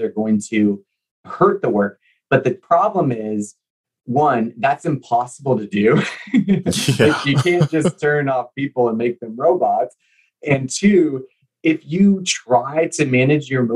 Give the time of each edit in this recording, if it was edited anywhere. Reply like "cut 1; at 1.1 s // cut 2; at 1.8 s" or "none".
cut 1; at 1.3 s // cut 2; at 2.6 s